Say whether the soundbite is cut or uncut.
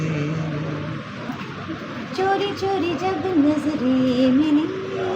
cut